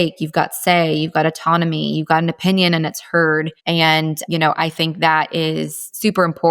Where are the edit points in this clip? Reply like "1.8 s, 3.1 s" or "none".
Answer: 3.6 s

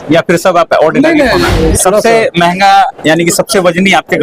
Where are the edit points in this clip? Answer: 1.6 s

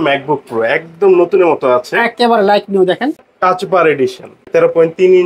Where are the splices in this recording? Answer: 3.2 s, 4.3 s

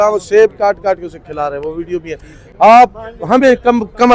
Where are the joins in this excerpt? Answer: none

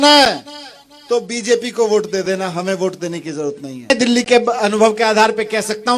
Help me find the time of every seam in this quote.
3.9 s

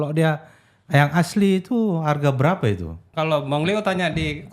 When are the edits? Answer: 3.0 s

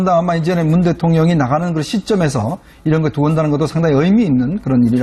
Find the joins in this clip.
3.9 s

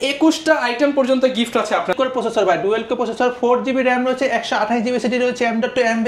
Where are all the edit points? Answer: 1.9 s

